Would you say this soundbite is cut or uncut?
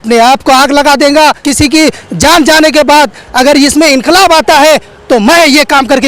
cut